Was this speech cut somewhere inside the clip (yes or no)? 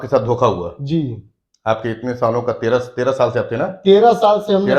no